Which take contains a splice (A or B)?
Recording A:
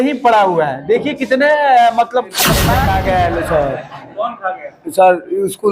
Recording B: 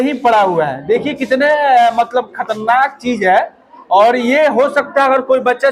A